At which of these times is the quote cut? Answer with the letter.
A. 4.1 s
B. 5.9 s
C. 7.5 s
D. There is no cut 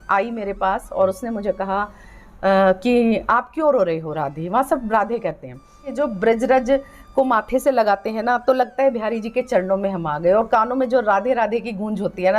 B